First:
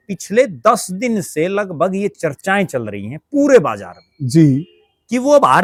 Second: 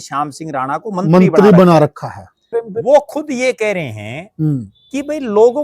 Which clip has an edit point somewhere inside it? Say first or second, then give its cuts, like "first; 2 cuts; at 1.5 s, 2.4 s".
second; 1 cut; at 2.6 s